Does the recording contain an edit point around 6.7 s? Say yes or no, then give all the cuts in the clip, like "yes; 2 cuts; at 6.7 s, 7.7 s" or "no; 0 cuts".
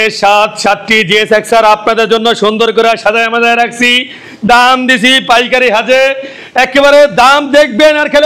no; 0 cuts